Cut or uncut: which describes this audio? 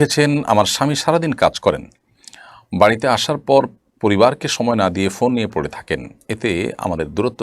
uncut